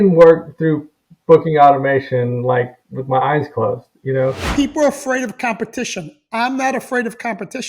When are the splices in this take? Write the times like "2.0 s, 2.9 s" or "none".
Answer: 4.4 s

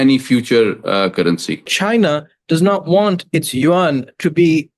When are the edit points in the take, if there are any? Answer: 1.7 s

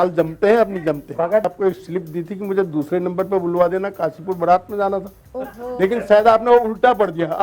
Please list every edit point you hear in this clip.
1.4 s

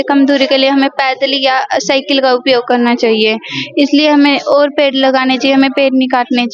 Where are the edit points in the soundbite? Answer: none

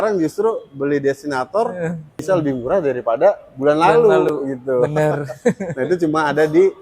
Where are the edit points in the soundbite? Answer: 2.2 s

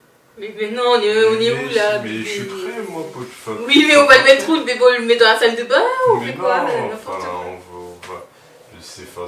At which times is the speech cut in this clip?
none

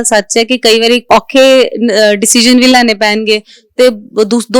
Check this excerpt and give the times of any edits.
1.0 s

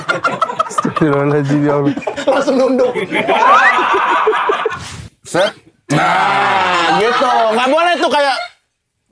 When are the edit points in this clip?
4.9 s

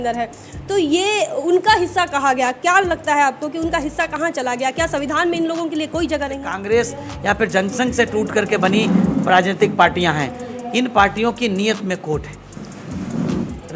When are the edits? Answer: 6.5 s

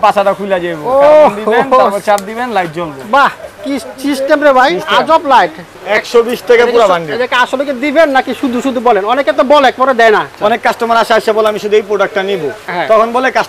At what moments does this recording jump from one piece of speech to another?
5.7 s, 10.3 s

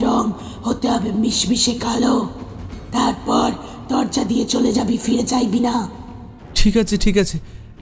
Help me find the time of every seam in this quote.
none

